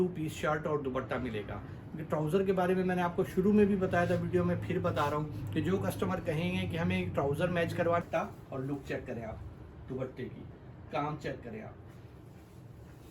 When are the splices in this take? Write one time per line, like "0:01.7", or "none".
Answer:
0:08.1